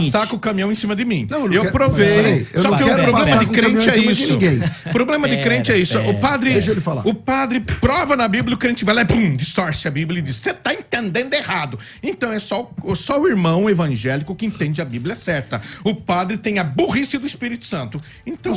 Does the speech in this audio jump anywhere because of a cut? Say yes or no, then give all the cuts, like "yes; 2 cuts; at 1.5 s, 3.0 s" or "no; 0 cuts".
no; 0 cuts